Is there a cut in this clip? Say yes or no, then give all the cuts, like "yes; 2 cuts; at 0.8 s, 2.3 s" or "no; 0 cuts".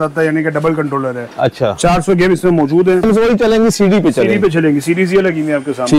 yes; 1 cut; at 3.0 s